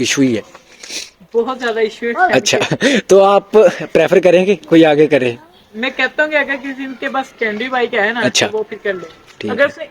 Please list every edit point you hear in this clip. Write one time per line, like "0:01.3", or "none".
none